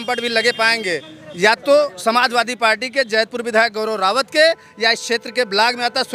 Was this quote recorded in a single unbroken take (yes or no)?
yes